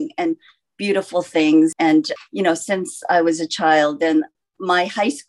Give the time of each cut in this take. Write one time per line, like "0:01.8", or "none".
0:01.8